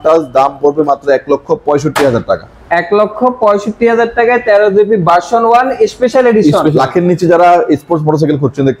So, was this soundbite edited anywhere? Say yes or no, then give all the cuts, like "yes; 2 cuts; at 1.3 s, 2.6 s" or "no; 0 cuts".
yes; 1 cut; at 6.7 s